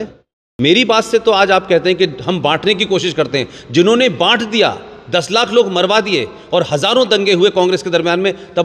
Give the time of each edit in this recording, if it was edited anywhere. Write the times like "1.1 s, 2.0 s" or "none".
none